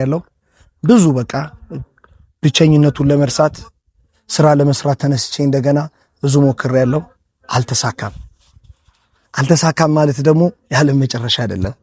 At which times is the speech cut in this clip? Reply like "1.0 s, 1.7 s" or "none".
none